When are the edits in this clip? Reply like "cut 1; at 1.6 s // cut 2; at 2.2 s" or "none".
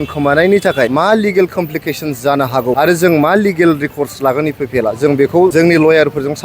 cut 1; at 0.9 s // cut 2; at 2.8 s // cut 3; at 5.5 s

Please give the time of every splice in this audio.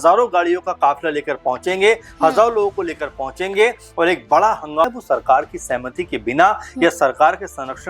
cut 1; at 4.8 s

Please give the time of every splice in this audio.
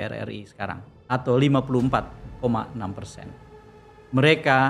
none

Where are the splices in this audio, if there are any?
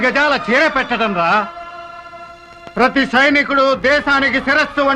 none

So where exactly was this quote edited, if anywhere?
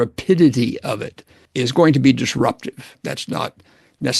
cut 1; at 1.4 s // cut 2; at 3.0 s

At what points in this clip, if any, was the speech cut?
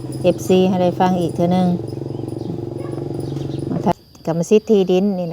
cut 1; at 3.9 s

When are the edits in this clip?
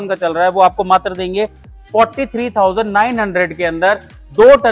none

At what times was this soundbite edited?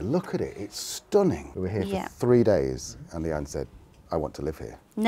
cut 1; at 1.5 s

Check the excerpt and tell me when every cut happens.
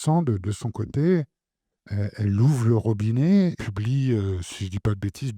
cut 1; at 3.6 s

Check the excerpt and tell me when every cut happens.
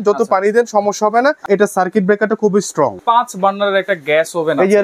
cut 1; at 1.4 s // cut 2; at 3.0 s

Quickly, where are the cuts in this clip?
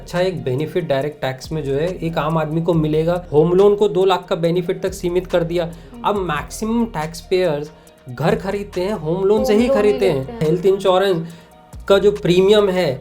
cut 1; at 3.2 s // cut 2; at 10.4 s

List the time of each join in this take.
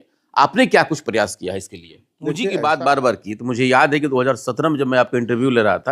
cut 1; at 2.4 s

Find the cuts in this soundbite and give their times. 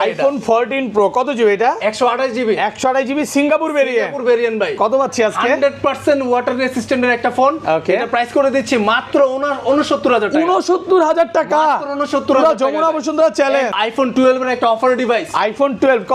cut 1; at 13.7 s

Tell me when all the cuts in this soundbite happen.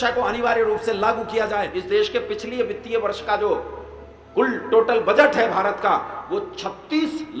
cut 1; at 1.7 s

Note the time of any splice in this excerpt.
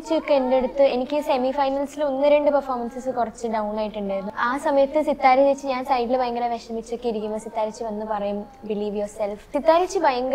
cut 1; at 4.3 s // cut 2; at 9.5 s

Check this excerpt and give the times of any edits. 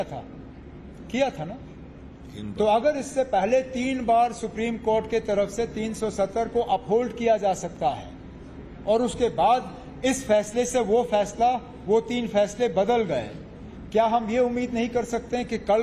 cut 1; at 14.7 s

